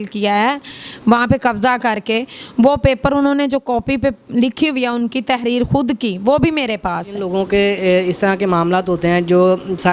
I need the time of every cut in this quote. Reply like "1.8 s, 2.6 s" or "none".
7.3 s